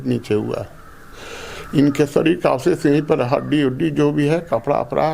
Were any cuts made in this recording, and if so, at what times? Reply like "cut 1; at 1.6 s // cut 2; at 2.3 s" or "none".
none